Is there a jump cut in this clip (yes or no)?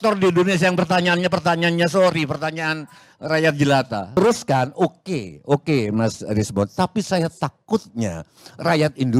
yes